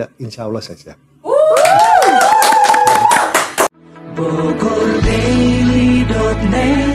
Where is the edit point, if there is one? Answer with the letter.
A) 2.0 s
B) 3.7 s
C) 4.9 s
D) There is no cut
B